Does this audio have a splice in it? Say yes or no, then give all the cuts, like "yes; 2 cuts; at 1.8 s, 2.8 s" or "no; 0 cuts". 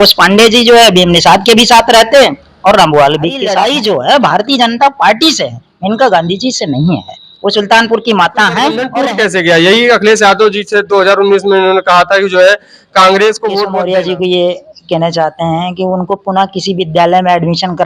yes; 3 cuts; at 3.4 s, 8.9 s, 13.7 s